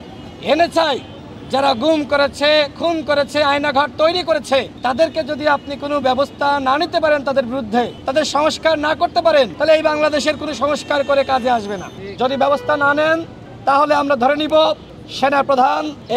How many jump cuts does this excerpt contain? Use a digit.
4